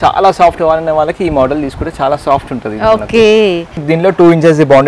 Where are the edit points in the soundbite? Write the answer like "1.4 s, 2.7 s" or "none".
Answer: 3.9 s